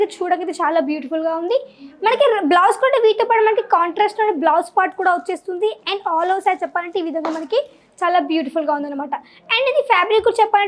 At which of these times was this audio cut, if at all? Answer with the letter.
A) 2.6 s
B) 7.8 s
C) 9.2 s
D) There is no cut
D